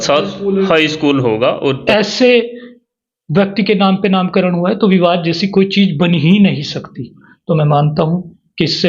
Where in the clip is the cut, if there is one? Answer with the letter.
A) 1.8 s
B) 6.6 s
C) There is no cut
A